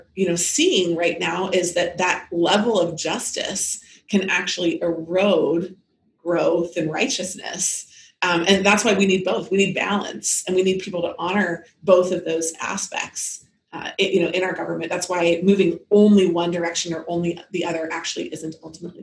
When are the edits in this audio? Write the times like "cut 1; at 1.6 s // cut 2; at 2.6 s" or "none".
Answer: none